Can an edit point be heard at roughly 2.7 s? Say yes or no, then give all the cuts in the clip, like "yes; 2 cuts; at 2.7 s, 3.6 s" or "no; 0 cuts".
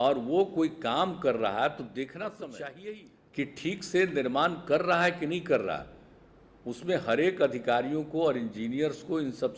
yes; 1 cut; at 2.7 s